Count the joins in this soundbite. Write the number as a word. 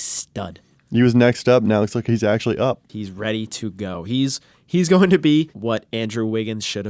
two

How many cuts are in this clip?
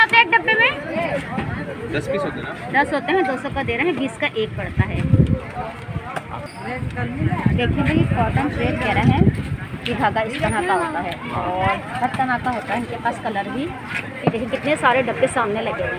zero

